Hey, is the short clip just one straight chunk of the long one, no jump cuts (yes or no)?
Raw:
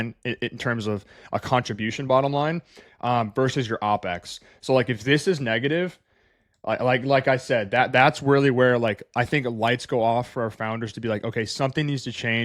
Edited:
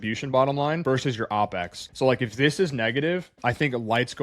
no